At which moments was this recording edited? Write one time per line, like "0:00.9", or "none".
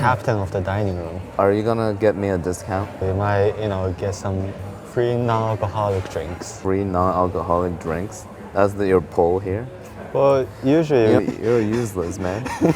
0:01.4
0:02.9
0:04.8
0:06.6
0:11.2